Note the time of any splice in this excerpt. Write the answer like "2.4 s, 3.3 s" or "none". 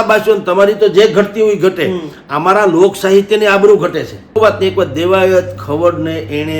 4.3 s